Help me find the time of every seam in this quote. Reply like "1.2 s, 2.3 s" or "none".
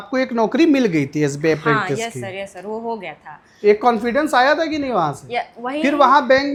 none